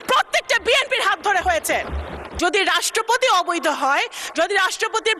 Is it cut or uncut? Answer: cut